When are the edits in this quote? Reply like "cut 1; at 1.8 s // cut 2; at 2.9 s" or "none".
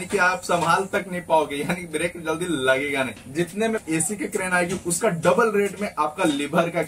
cut 1; at 3.7 s